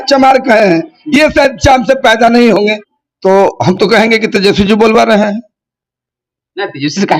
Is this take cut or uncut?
cut